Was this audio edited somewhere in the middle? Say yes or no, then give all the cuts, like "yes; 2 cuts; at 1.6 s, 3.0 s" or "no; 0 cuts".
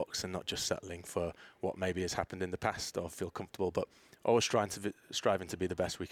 no; 0 cuts